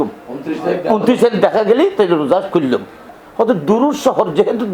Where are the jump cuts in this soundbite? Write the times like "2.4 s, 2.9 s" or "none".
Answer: 3.1 s